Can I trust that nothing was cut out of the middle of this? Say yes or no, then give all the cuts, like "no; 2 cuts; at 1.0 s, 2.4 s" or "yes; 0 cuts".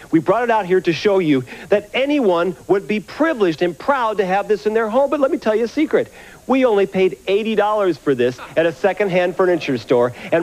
yes; 0 cuts